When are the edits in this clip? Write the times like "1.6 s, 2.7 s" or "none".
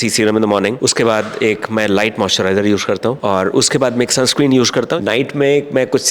0.8 s, 3.2 s, 4.9 s